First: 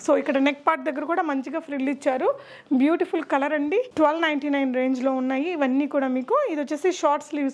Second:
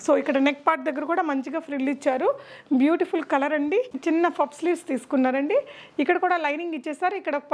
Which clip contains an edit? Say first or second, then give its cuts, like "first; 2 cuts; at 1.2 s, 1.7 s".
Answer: second; 1 cut; at 3.9 s